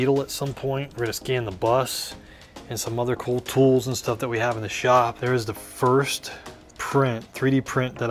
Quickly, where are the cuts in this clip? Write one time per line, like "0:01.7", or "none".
0:00.9
0:05.2